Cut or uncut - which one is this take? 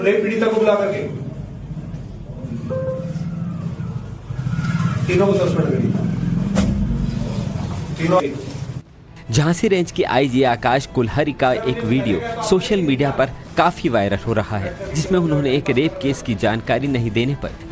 cut